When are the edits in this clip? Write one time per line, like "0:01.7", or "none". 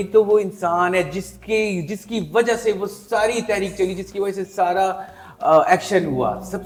none

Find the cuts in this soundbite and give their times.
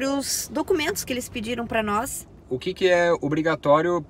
0:02.4

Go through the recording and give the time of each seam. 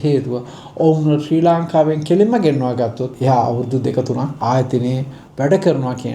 0:03.1
0:04.4

